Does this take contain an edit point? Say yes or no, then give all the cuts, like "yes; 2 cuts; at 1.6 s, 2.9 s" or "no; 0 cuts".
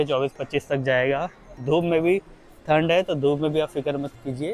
no; 0 cuts